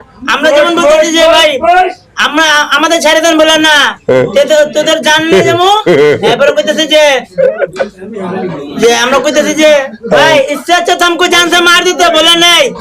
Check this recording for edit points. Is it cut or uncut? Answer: uncut